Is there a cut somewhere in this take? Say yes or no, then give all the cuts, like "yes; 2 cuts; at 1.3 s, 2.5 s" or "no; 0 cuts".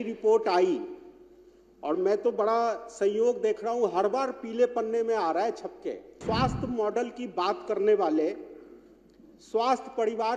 yes; 1 cut; at 6.2 s